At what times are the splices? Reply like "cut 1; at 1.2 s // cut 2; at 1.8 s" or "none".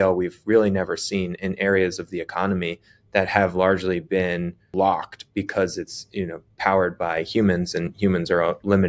cut 1; at 4.7 s